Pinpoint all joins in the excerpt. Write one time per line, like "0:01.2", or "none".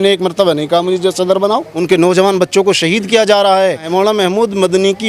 0:01.7
0:03.9